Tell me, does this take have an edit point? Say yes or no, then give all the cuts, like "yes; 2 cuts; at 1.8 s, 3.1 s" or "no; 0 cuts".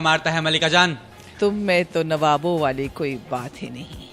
yes; 1 cut; at 1.2 s